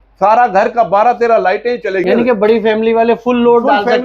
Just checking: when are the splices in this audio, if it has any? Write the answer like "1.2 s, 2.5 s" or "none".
2.0 s